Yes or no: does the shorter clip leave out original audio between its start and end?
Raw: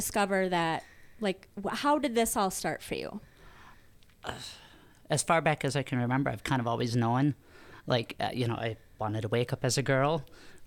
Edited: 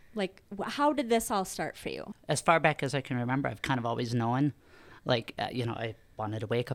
yes